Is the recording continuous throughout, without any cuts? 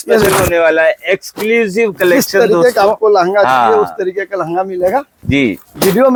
yes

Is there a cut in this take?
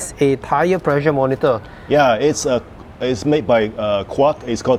no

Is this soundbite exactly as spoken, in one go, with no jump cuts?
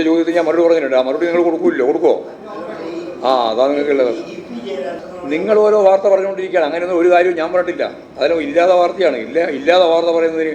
no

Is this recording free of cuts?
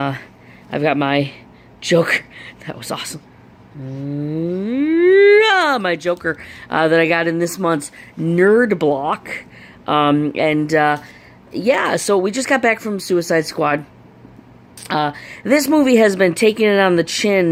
yes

